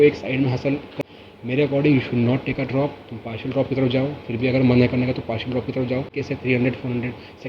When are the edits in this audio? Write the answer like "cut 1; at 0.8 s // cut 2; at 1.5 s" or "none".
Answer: cut 1; at 1.0 s // cut 2; at 6.2 s